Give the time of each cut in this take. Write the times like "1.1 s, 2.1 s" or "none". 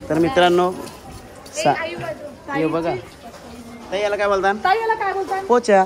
none